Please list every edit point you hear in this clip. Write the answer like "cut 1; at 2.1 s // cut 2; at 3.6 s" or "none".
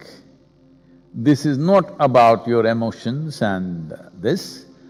none